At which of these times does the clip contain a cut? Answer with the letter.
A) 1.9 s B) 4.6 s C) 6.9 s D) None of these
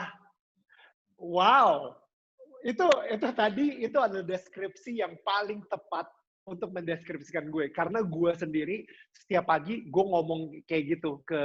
D